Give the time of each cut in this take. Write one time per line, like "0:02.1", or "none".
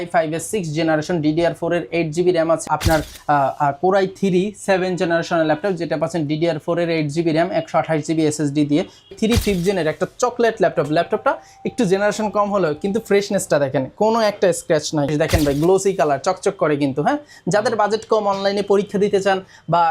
0:02.7
0:09.1
0:15.1